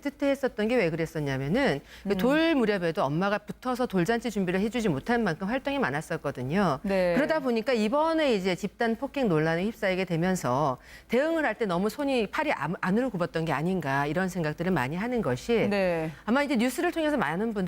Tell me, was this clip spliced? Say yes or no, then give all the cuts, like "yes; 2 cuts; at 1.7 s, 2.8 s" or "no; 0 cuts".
yes; 1 cut; at 10.5 s